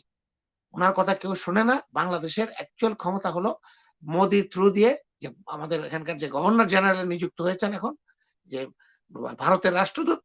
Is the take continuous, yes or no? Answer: yes